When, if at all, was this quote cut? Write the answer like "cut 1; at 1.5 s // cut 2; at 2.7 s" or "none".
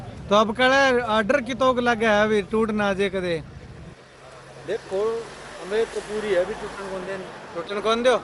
none